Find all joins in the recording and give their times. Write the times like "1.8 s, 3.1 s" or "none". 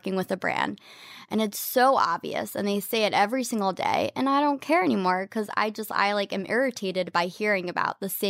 none